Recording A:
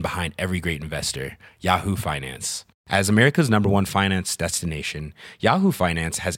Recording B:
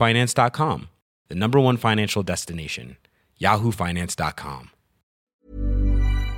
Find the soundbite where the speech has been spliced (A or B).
B